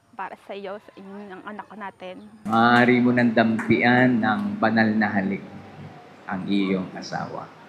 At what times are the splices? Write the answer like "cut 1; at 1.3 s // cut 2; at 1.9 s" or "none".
cut 1; at 2.4 s